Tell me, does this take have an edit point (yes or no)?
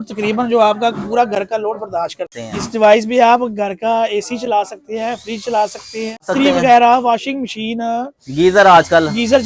yes